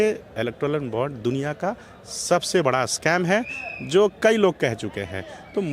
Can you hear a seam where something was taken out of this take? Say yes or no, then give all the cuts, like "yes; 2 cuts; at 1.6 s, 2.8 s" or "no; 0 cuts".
no; 0 cuts